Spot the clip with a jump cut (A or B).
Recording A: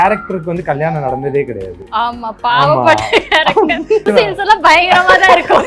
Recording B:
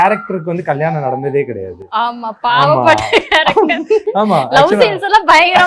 A